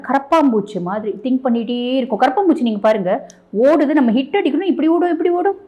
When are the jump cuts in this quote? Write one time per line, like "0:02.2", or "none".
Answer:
none